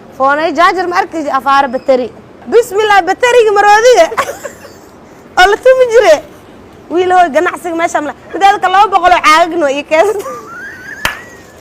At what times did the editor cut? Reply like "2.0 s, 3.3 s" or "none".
2.3 s